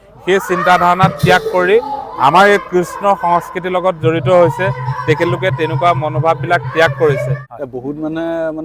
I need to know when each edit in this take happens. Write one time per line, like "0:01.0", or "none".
0:07.4